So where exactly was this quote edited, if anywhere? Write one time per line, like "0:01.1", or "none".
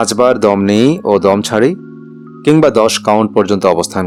none